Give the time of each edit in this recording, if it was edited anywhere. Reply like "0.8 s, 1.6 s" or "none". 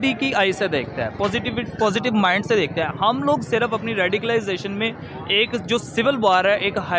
none